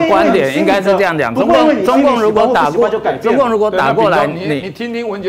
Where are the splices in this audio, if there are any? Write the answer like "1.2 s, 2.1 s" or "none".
none